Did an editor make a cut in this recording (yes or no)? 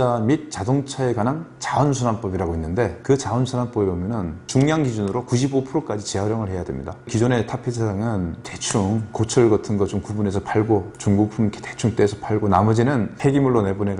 no